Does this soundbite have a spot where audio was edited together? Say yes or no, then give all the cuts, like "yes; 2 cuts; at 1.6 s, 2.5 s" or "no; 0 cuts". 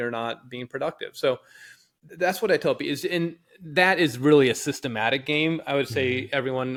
no; 0 cuts